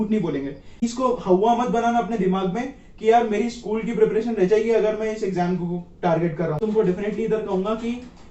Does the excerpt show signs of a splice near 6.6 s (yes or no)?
yes